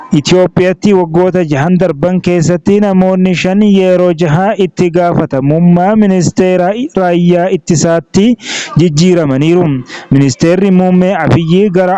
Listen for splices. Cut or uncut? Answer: uncut